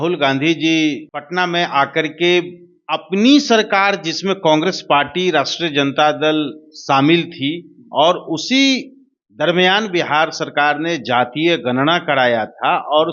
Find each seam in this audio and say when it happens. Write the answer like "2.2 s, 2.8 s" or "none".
1.1 s